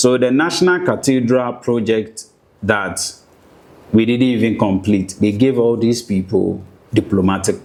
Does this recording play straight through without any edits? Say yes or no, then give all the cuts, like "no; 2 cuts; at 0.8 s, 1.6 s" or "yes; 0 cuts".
yes; 0 cuts